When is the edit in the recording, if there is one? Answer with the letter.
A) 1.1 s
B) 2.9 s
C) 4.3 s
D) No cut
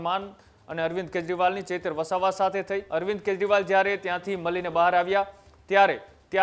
B